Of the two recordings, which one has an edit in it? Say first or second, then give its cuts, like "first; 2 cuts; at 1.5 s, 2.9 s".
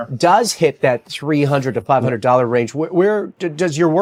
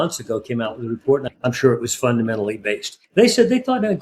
second; 2 cuts; at 1.3 s, 2.9 s